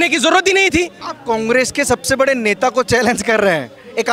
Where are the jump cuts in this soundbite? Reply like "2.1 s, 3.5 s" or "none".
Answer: 1.1 s

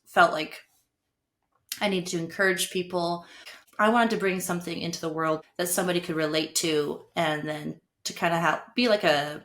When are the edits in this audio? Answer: 3.6 s, 5.4 s

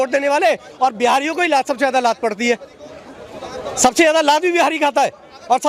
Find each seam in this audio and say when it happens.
none

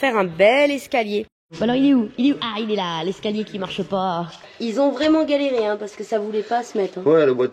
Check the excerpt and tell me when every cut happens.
1.4 s, 4.5 s

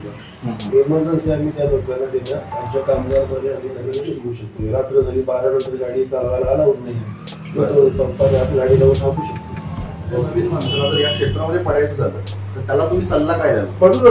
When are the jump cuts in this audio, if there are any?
4.0 s, 10.3 s

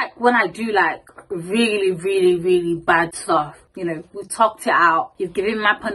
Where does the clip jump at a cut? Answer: 3.6 s, 5.1 s

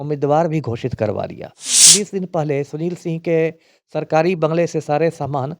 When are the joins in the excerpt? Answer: 1.9 s

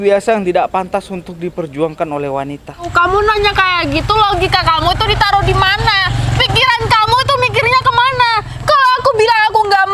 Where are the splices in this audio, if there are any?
2.9 s

